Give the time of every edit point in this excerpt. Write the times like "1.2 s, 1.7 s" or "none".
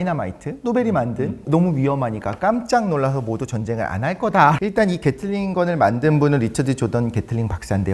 1.4 s, 4.6 s